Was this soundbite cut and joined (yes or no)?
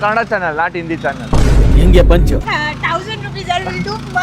yes